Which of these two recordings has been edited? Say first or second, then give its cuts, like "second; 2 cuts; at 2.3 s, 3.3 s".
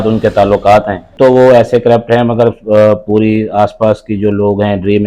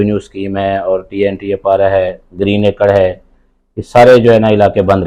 first; 1 cut; at 1.1 s